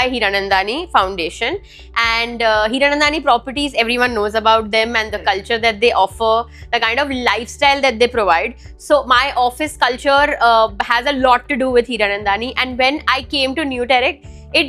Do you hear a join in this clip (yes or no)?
no